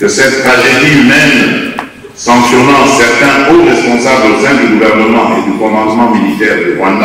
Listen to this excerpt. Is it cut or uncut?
uncut